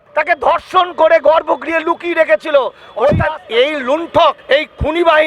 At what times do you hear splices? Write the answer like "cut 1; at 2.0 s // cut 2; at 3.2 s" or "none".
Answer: cut 1; at 3.3 s // cut 2; at 4.4 s